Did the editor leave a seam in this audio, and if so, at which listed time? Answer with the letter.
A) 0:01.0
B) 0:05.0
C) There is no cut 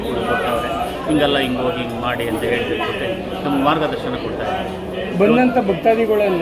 C